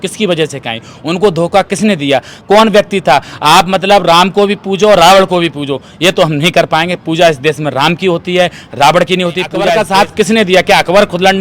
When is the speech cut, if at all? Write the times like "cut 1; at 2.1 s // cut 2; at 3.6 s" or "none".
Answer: cut 1; at 9.7 s